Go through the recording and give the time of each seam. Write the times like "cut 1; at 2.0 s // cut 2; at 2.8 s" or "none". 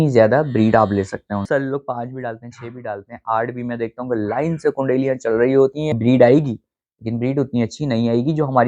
cut 1; at 1.5 s // cut 2; at 5.9 s

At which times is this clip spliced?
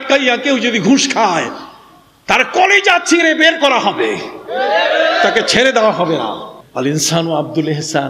cut 1; at 6.6 s

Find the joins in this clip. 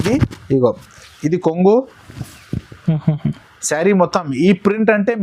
none

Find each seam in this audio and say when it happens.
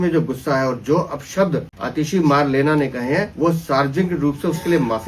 cut 1; at 1.8 s // cut 2; at 3.3 s

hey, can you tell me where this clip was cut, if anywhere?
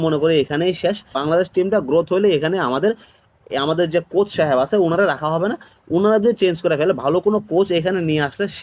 cut 1; at 1.2 s

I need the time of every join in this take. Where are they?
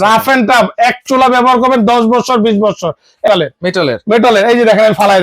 cut 1; at 3.3 s

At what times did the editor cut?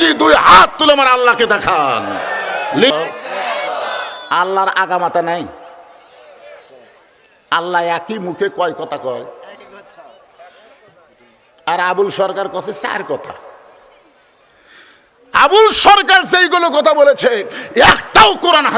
cut 1; at 2.9 s

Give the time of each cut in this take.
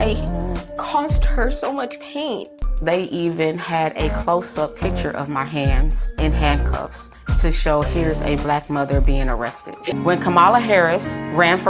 cut 1; at 2.6 s // cut 2; at 9.9 s

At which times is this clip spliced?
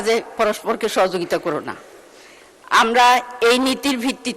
none

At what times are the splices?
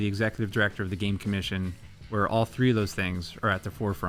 none

